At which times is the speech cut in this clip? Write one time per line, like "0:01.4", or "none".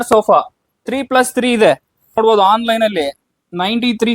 0:02.2